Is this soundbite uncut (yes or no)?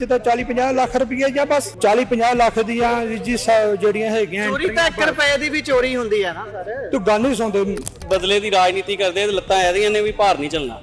no